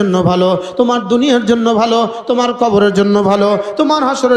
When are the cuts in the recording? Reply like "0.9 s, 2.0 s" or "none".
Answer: none